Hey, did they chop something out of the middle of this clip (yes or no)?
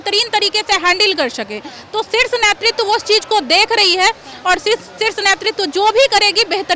no